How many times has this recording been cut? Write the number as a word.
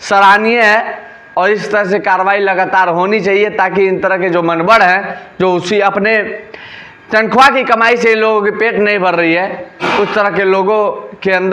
zero